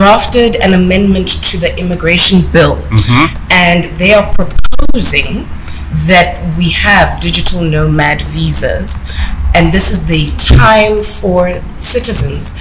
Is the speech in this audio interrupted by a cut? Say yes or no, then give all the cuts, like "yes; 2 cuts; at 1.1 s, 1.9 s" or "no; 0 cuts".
no; 0 cuts